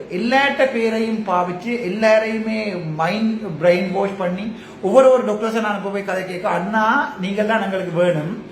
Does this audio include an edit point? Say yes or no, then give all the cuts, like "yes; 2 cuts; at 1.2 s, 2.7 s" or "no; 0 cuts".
no; 0 cuts